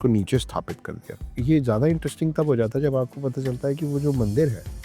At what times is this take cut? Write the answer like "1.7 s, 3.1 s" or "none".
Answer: 1.2 s